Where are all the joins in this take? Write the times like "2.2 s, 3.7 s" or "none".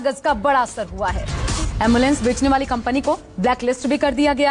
1.1 s